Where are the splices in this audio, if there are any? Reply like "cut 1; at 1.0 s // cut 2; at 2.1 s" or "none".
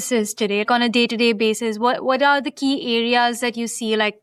none